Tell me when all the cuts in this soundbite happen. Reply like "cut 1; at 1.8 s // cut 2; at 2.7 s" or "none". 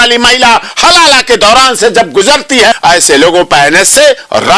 cut 1; at 2.7 s